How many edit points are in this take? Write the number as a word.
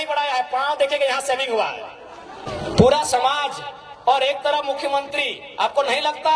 one